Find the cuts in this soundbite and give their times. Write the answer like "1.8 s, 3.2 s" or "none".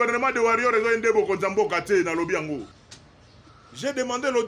2.8 s